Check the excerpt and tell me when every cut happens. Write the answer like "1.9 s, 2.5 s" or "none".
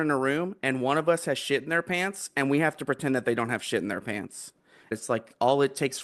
4.9 s